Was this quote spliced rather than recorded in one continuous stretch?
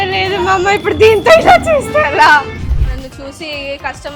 no; 0 cuts

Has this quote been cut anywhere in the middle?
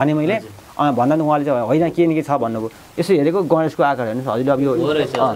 no; 0 cuts

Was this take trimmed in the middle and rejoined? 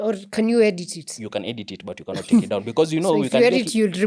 no; 0 cuts

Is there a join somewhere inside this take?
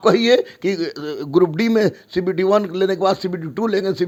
no; 0 cuts

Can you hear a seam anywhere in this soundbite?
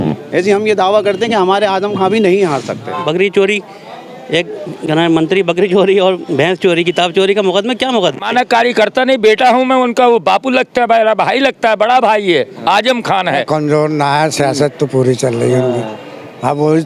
yes; 3 cuts; at 3.0 s, 8.2 s, 13.4 s

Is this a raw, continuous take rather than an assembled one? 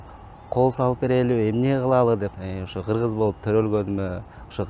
no; 1 cut; at 2.3 s

